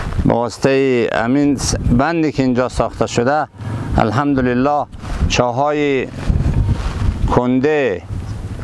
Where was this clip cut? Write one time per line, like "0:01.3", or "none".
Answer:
none